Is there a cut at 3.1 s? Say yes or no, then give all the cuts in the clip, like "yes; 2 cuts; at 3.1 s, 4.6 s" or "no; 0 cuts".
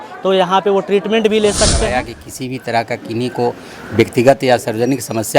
no; 1 cut; at 1.6 s